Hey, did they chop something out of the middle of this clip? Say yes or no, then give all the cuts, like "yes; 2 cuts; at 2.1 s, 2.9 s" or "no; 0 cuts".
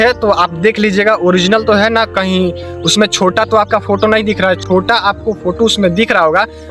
yes; 1 cut; at 4.6 s